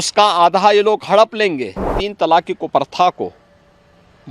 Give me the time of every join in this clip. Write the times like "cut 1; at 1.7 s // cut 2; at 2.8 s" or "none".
cut 1; at 2.0 s